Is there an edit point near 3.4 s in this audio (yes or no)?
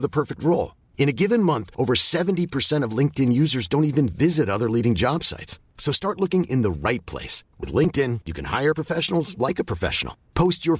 no